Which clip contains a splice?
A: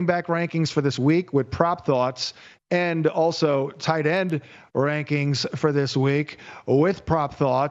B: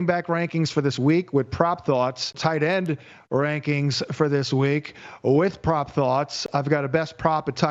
B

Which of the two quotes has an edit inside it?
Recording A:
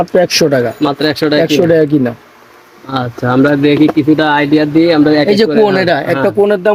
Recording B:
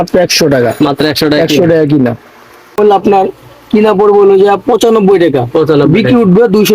B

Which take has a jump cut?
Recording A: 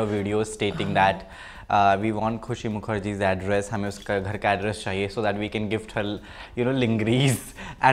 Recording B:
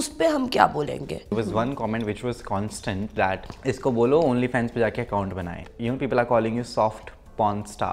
B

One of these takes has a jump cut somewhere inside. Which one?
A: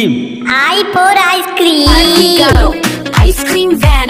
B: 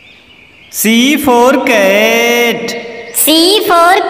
A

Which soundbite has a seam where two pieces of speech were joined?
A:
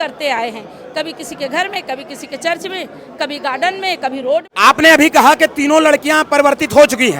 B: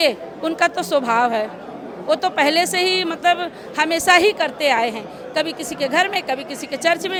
A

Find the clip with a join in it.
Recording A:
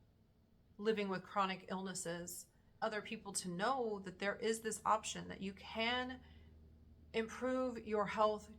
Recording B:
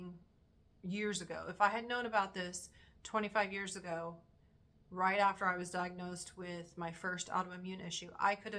A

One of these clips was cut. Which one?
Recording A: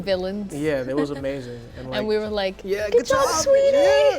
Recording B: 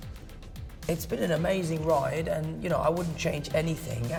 A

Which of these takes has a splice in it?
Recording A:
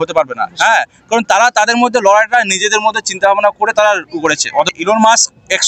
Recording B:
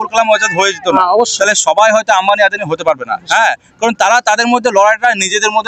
A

